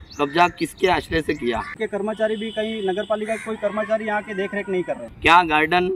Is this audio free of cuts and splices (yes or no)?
no